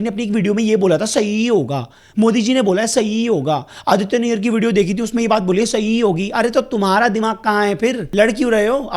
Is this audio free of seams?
no; 1 cut; at 8.0 s

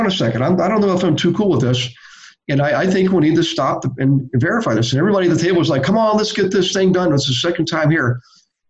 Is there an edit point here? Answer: yes; 1 cut; at 4.2 s

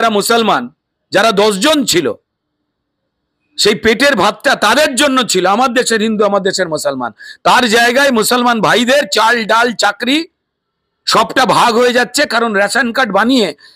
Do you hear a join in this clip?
no; 0 cuts

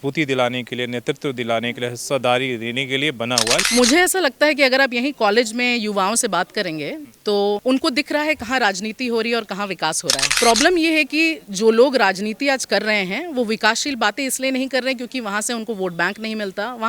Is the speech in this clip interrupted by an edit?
yes; 1 cut; at 3.6 s

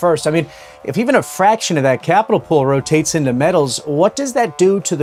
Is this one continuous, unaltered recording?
yes; 0 cuts

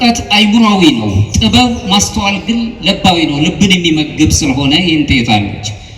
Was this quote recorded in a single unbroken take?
yes; 0 cuts

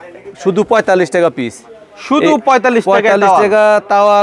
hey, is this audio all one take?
yes; 0 cuts

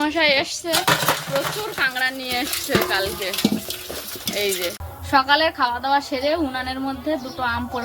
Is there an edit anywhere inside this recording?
yes; 1 cut; at 4.9 s

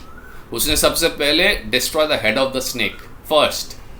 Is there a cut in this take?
no; 0 cuts

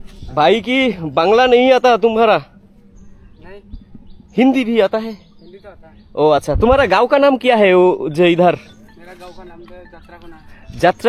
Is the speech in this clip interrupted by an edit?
no; 0 cuts

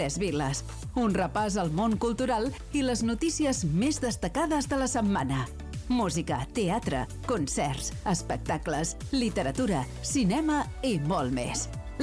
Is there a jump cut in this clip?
no; 0 cuts

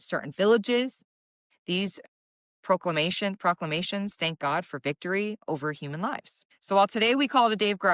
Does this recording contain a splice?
no; 0 cuts

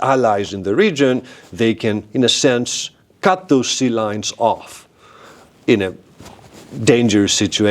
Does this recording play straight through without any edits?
yes; 0 cuts

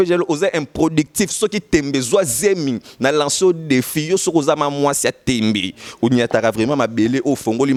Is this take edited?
no; 0 cuts

